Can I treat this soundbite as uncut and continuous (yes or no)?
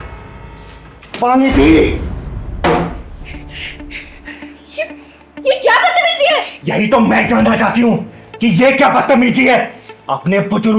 no